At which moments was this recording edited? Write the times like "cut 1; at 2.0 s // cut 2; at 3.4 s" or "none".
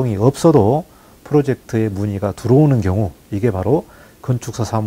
none